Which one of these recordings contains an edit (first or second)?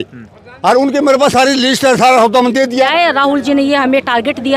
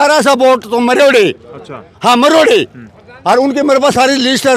first